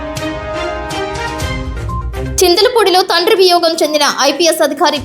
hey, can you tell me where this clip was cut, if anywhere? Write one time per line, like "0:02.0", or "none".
0:02.1